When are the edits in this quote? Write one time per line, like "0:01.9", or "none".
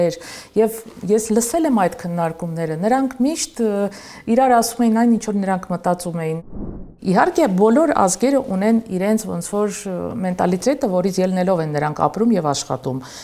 0:06.5